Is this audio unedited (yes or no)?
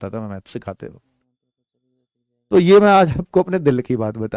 yes